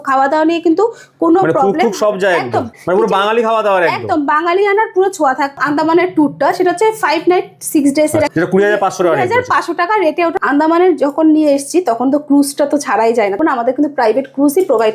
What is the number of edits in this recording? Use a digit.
5